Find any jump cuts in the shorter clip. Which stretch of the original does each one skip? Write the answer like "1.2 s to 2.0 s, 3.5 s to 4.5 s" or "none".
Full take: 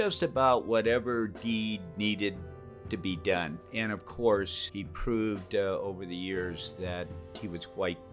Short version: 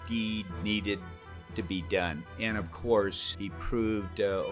none